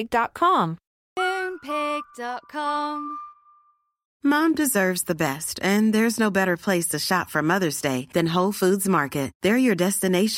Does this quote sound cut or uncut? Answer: cut